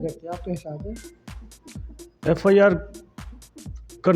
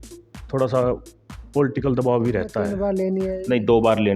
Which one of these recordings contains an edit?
second; 1 cut; at 2.7 s

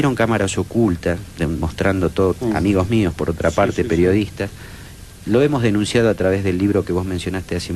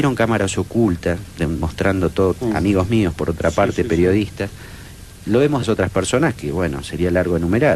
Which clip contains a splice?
first; 1 cut; at 5.6 s

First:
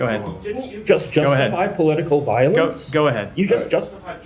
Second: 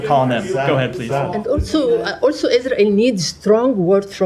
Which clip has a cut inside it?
second; 1 cut; at 1.4 s

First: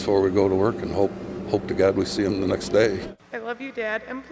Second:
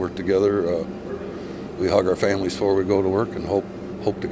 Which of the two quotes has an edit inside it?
first; 1 cut; at 3.1 s

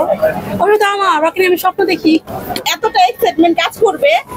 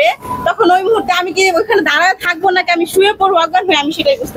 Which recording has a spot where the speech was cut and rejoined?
first; 1 cut; at 2.7 s

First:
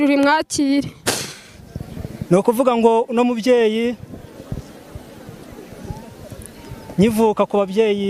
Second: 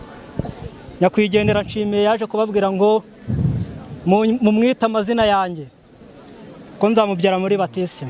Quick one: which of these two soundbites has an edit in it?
first; 1 cut; at 2.3 s

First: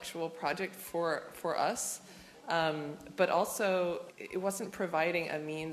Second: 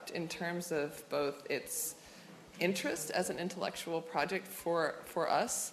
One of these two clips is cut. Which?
first; 1 cut; at 4.1 s

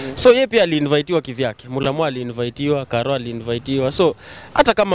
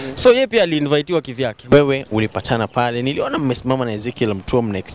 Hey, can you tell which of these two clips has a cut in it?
second; 1 cut; at 1.7 s

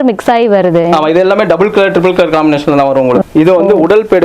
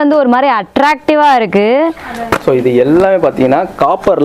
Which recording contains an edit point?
first; 1 cut; at 3.2 s

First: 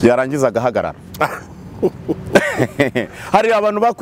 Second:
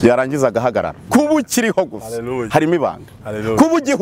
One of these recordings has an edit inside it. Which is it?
second; 1 cut; at 1.0 s

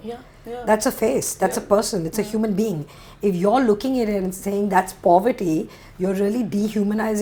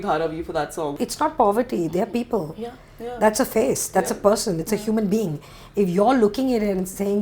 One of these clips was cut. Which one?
second; 1 cut; at 1.0 s

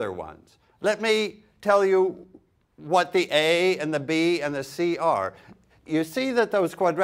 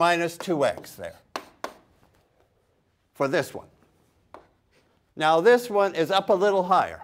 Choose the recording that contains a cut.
first; 1 cut; at 1.6 s

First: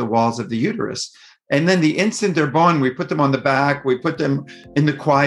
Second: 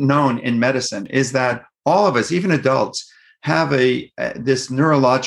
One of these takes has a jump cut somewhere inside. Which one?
second; 1 cut; at 1.0 s

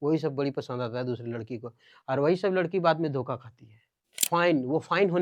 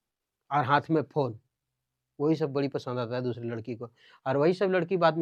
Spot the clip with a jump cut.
first; 1 cut; at 4.2 s

